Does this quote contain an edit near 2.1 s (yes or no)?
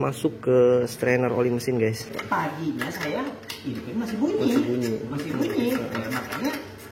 yes